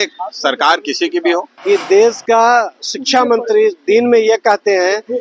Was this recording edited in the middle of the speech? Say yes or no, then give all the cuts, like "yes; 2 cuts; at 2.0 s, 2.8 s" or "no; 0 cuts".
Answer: yes; 1 cut; at 1.5 s